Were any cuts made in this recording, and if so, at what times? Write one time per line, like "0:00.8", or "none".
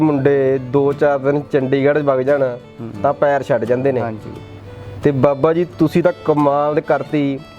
none